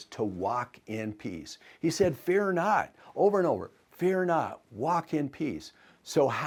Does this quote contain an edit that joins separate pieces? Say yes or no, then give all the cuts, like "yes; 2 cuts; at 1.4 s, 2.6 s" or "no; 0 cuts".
no; 0 cuts